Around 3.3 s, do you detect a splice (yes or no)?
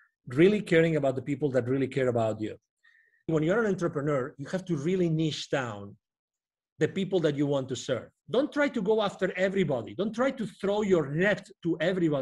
yes